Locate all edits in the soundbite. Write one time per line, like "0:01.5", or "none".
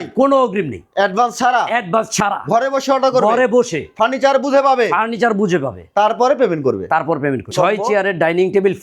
0:07.5